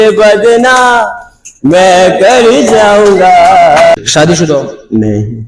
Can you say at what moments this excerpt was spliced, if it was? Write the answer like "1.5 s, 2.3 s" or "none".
3.9 s

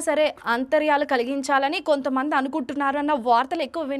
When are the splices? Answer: none

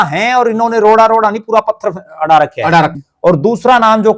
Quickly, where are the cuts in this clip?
3.0 s

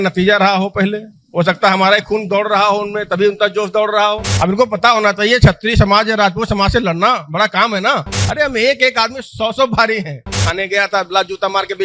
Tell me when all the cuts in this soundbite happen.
4.3 s, 8.2 s, 10.4 s

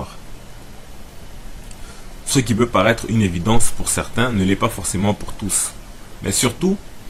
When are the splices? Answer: none

